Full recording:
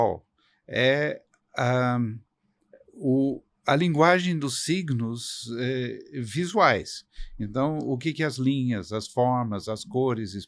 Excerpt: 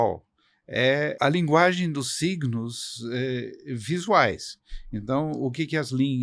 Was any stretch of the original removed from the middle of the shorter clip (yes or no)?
yes